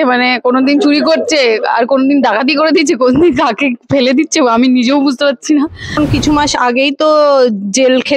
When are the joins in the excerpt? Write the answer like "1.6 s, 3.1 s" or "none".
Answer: 6.0 s

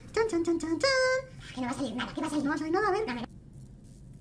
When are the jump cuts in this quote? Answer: 3.3 s

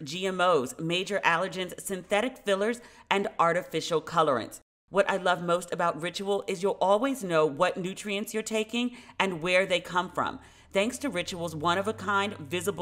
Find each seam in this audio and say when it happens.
4.6 s

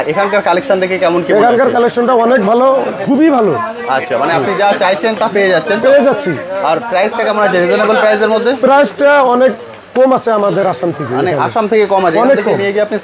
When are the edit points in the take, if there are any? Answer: none

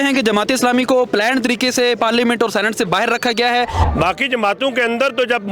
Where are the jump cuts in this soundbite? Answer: 3.8 s

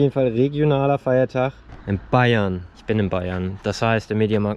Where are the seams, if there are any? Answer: 1.7 s, 2.7 s

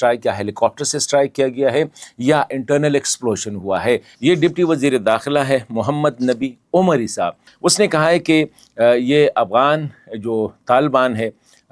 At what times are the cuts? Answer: 4.1 s, 7.4 s

